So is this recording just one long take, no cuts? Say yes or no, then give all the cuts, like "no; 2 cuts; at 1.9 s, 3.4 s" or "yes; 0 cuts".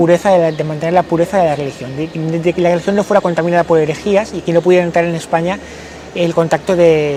yes; 0 cuts